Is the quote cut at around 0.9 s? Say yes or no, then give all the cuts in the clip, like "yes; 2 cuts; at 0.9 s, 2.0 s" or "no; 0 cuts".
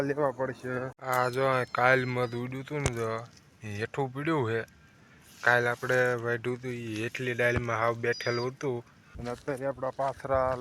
yes; 2 cuts; at 0.9 s, 9.3 s